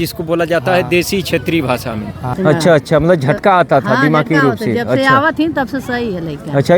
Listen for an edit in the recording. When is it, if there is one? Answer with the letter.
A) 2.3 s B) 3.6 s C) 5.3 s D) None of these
A